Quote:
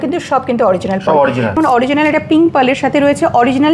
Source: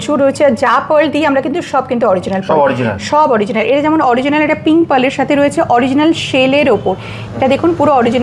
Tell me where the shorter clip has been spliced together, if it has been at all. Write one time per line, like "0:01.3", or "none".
0:01.6